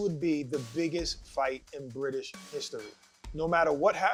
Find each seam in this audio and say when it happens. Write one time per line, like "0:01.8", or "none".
none